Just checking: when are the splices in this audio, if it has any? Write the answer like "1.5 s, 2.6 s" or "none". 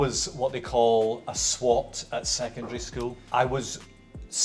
3.2 s